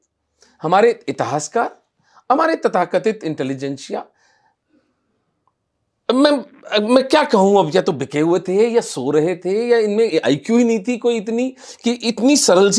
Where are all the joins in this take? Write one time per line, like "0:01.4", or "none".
none